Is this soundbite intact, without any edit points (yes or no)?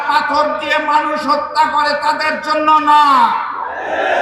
yes